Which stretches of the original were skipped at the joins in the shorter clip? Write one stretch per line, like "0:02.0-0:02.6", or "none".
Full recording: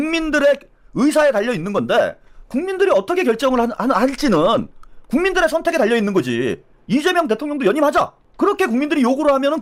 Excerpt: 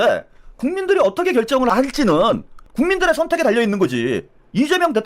0:03.6-0:03.9
0:04.8-0:04.9

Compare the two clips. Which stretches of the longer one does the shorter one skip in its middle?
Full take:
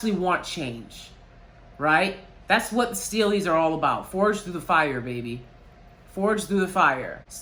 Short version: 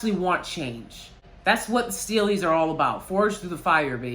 0:01.2-0:02.3

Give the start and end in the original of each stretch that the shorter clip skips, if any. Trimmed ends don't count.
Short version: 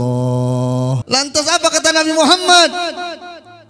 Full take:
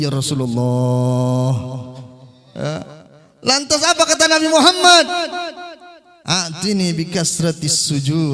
0:01.6-0:03.4

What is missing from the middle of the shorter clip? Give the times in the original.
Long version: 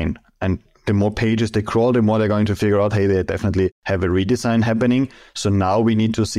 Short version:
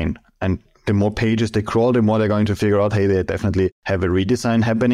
none

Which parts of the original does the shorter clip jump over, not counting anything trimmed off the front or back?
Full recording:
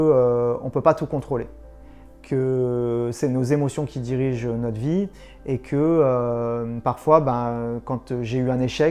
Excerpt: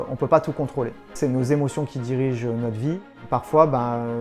0:01.7-0:03.1
0:05.1-0:06.7

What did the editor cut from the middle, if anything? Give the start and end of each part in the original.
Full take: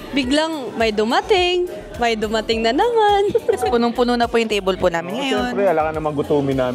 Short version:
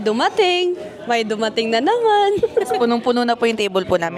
none

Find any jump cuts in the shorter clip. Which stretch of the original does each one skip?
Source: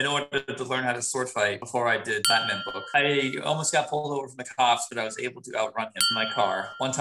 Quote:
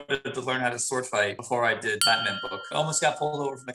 0:02.9-0:03.3

